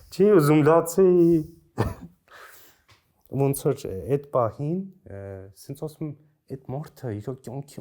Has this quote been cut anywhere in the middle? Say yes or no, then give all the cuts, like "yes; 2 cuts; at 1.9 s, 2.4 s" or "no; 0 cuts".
no; 0 cuts